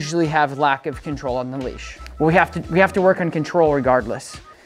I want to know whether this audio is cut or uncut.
cut